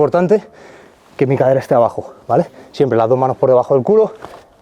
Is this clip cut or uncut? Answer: uncut